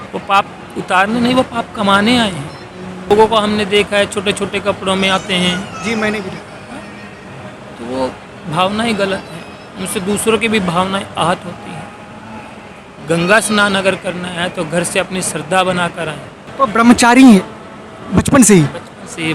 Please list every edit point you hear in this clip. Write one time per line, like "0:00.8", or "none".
0:03.1
0:16.5